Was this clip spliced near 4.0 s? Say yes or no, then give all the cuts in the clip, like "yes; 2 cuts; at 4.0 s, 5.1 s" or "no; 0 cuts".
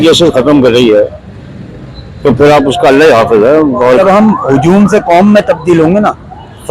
yes; 1 cut; at 4.0 s